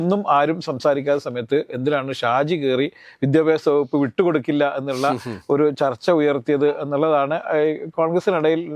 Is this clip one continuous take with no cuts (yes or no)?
yes